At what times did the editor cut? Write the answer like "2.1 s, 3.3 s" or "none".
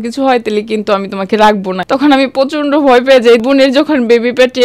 1.8 s, 3.4 s